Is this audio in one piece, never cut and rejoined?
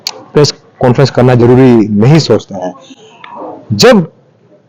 yes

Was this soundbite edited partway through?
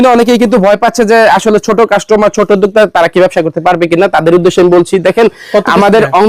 no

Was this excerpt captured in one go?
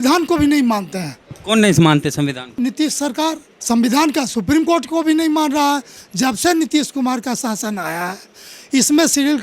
no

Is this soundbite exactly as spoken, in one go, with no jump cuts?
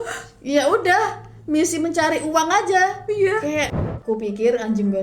no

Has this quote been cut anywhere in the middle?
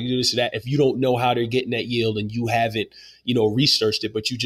no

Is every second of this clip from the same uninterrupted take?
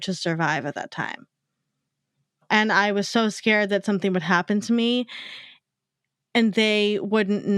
no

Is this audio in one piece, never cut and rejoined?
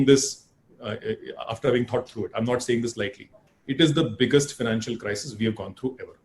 yes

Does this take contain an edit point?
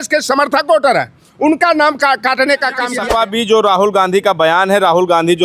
yes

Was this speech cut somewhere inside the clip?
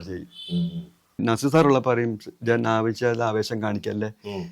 yes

